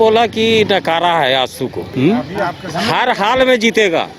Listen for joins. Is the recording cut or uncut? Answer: cut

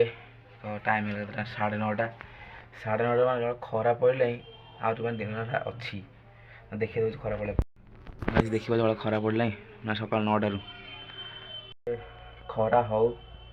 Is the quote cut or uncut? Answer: cut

